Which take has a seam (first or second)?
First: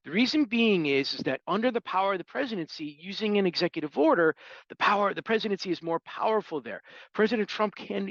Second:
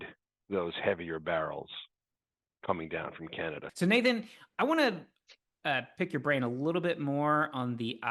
second